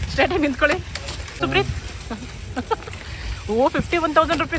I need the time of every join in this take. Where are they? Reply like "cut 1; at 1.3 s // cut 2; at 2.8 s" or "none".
cut 1; at 1.4 s